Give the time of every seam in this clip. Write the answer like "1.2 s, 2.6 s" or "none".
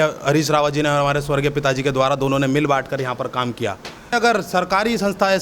4.1 s